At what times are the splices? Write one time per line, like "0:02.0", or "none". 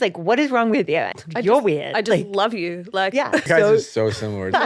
0:01.1
0:03.5